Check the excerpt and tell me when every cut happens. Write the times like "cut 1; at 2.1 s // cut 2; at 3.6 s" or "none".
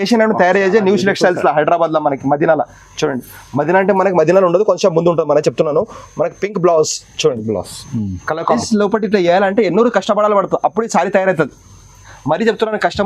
cut 1; at 8.6 s